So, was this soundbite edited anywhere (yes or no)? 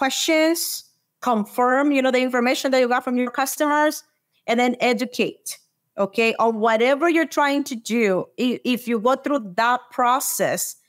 no